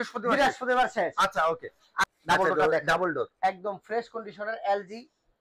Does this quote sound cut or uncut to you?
cut